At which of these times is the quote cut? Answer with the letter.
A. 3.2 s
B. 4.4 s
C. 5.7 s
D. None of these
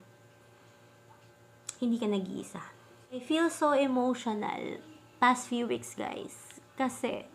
A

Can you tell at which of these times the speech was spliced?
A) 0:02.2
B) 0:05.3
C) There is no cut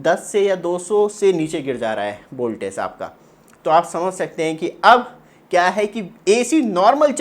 C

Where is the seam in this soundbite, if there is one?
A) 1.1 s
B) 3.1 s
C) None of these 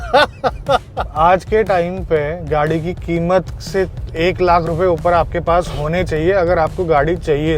A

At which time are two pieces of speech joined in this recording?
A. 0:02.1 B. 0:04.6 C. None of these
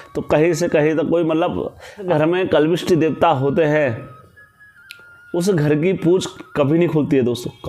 A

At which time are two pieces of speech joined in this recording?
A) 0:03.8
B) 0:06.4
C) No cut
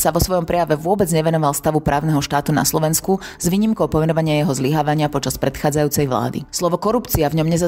B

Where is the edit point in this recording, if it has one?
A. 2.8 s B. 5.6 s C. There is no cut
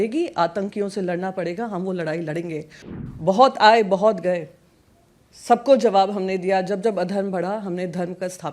A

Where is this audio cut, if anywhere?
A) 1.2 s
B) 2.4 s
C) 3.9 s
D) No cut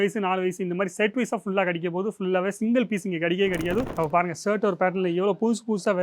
C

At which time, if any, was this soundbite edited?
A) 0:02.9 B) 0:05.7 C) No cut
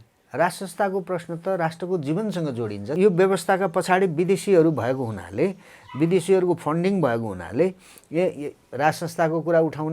A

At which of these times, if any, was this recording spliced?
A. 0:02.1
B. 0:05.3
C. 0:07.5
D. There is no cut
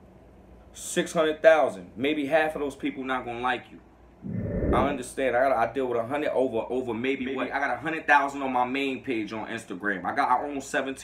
C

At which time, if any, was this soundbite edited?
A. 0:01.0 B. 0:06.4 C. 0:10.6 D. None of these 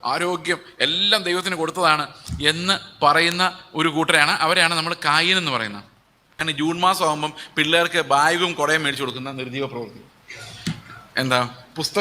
B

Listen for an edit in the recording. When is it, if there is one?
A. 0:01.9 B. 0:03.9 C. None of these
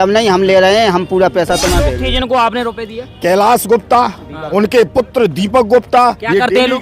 A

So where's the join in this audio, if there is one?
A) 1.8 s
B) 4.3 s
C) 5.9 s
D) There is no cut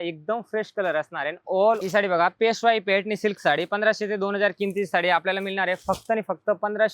A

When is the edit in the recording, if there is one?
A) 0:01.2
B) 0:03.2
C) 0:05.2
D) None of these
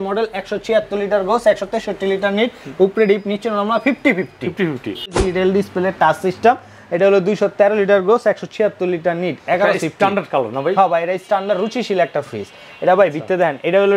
C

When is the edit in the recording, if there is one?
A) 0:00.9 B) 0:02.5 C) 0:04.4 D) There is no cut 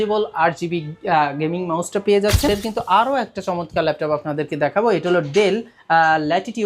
B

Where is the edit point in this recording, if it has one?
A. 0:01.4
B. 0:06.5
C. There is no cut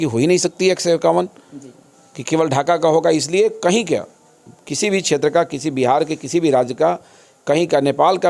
C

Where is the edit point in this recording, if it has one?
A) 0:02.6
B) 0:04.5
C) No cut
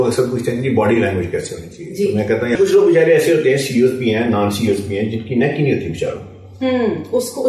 A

